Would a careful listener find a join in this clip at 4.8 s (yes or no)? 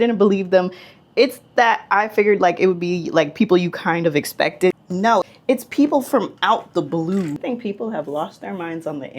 yes